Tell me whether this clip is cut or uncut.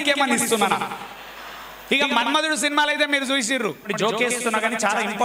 cut